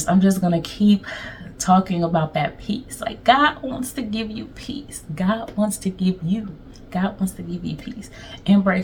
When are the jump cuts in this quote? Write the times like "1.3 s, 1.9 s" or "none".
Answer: none